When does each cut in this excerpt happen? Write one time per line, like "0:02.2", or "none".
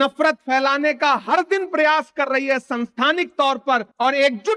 none